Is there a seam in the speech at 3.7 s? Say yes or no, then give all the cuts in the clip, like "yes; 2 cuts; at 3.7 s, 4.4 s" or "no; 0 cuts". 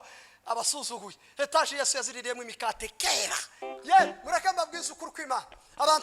yes; 1 cut; at 3.7 s